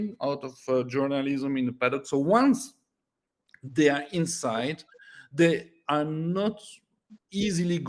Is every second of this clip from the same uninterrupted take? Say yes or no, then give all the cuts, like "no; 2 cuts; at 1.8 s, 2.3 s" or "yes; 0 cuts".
yes; 0 cuts